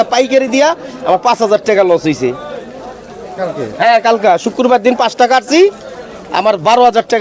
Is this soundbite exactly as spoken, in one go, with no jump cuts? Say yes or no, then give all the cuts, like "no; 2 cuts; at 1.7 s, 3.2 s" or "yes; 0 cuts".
yes; 0 cuts